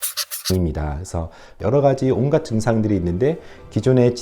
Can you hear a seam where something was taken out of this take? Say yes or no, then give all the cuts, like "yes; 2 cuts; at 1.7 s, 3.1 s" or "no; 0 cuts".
yes; 1 cut; at 1.5 s